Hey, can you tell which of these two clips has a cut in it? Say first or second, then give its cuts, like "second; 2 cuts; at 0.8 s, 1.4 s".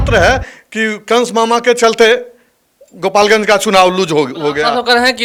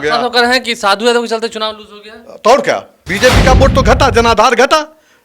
second; 1 cut; at 3.0 s